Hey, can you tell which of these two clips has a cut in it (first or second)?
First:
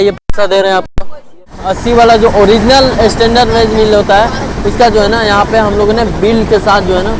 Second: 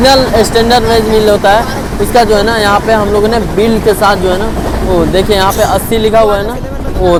first